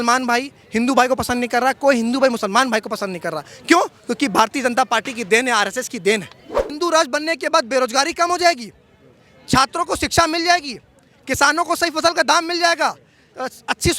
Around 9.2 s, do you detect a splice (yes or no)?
no